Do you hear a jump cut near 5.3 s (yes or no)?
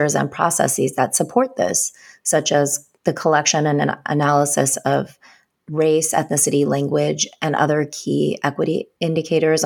no